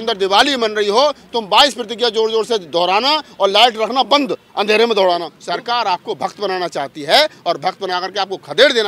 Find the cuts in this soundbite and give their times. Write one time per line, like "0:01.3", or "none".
0:05.3